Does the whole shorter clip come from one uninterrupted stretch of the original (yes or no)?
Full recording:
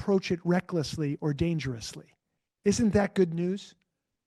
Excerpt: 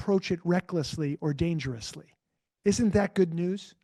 yes